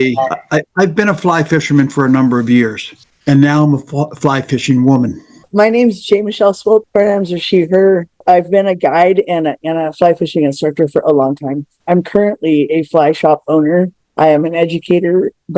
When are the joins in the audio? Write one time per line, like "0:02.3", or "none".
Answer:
0:05.4
0:06.9
0:08.1
0:14.0